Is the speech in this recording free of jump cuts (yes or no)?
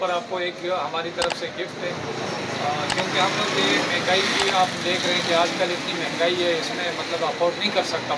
yes